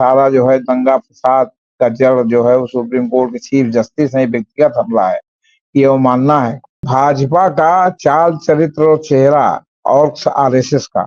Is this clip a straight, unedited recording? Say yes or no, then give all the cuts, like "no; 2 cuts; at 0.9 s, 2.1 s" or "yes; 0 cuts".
no; 1 cut; at 6.9 s